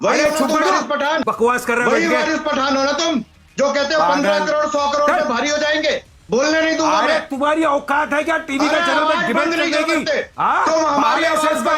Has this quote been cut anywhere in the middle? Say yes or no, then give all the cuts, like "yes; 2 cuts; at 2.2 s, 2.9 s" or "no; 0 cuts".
yes; 1 cut; at 1.2 s